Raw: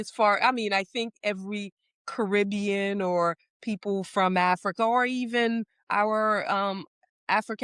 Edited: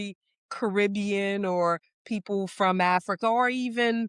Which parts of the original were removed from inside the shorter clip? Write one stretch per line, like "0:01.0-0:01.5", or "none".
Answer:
none